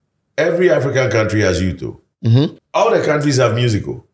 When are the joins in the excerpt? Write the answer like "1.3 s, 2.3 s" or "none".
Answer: 2.6 s